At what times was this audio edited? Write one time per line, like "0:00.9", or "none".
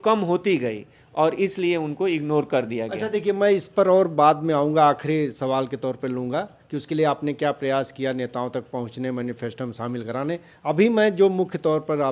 none

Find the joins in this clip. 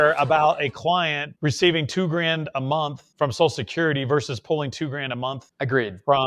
0:01.2
0:03.0
0:05.4

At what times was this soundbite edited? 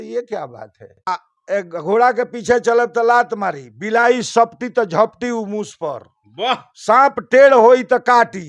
0:01.1

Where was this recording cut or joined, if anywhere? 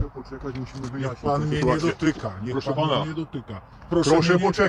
none

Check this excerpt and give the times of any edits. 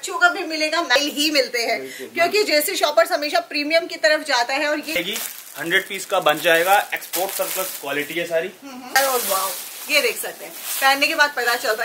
0:00.9
0:05.0
0:08.9

